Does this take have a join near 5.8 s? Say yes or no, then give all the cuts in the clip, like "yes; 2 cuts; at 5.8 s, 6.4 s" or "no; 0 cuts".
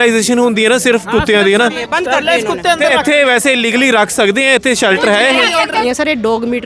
yes; 2 cuts; at 1.8 s, 5.8 s